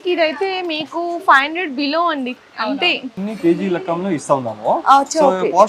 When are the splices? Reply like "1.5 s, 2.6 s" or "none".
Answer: 3.1 s